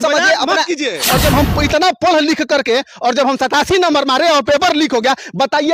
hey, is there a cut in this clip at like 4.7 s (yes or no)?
no